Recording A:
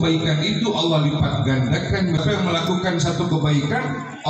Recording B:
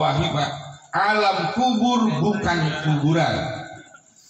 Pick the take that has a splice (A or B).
A